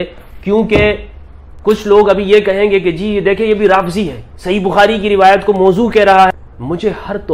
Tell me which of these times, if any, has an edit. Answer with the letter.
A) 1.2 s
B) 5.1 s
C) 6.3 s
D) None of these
C